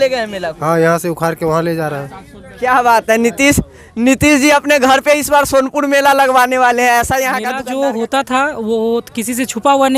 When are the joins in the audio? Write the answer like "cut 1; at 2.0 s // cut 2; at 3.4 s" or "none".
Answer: cut 1; at 7.6 s